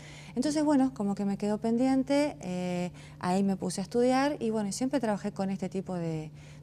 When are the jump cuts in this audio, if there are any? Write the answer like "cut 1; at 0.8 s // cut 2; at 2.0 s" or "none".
cut 1; at 5.7 s